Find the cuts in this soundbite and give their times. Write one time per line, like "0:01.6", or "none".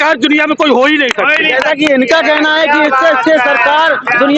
none